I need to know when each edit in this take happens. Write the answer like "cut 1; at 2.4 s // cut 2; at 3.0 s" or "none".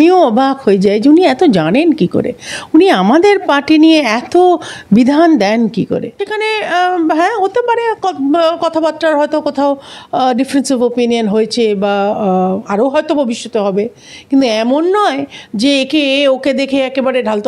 cut 1; at 6.2 s